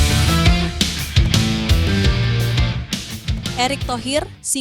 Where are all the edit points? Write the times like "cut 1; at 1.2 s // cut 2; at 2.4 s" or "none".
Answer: none